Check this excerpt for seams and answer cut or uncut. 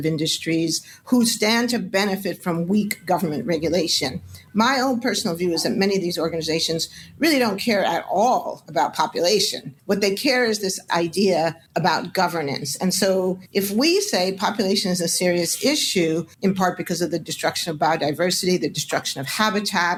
uncut